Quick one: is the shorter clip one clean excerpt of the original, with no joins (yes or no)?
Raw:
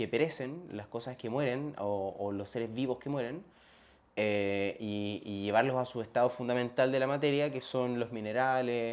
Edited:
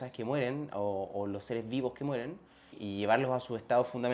no